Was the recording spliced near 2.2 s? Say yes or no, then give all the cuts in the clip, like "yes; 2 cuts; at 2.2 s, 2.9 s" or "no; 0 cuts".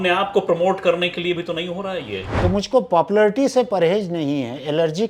yes; 1 cut; at 2.2 s